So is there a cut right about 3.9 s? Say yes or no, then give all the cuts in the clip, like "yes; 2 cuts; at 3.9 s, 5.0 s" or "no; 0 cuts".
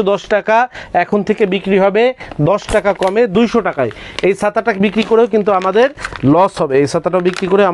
no; 0 cuts